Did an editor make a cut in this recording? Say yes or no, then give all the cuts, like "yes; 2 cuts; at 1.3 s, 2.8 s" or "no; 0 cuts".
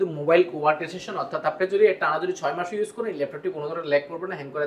no; 0 cuts